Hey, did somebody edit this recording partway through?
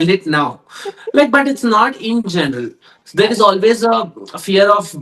no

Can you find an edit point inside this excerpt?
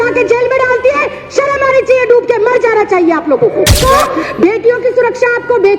yes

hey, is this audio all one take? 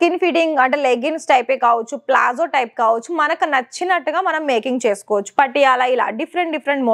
yes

